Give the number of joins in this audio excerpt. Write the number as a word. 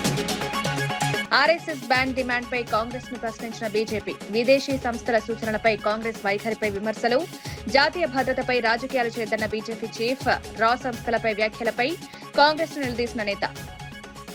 one